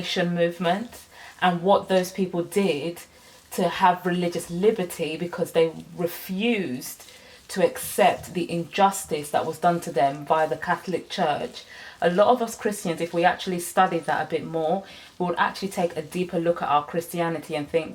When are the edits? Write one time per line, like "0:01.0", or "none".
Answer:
none